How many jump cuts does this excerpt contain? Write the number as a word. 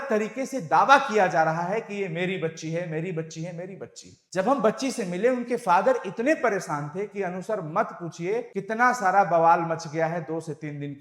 one